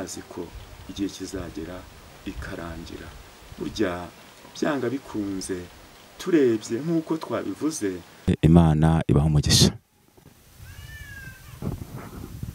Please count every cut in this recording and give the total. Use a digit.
1